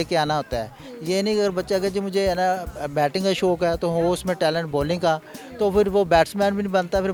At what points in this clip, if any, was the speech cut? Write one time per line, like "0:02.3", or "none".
none